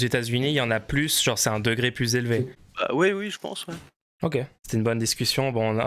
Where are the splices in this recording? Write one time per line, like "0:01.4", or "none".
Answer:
0:02.6
0:04.6